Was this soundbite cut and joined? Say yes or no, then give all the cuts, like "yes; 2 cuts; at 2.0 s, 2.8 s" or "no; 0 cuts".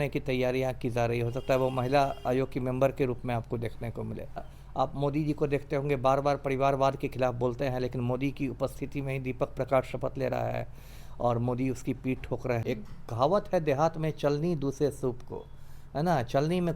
yes; 2 cuts; at 4.6 s, 12.6 s